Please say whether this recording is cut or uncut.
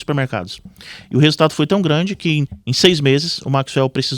cut